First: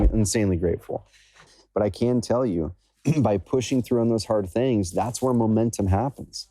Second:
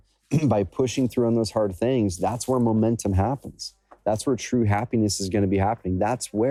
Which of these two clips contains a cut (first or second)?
first